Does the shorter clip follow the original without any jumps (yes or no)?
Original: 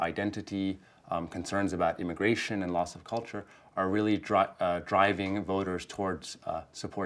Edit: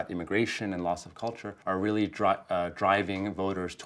no